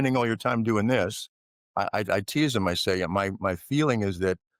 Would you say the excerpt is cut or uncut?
uncut